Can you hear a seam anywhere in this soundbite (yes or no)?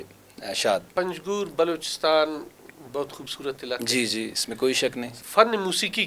yes